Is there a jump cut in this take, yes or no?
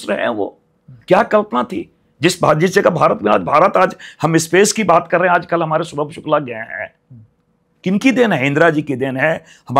no